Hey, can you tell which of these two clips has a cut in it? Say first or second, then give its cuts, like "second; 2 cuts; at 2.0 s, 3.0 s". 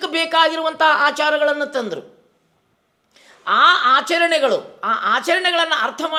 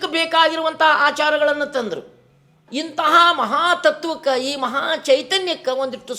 second; 1 cut; at 2.6 s